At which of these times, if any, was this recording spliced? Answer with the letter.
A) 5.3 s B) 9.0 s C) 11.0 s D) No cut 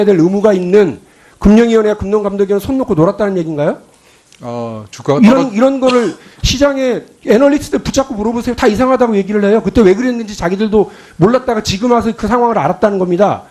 D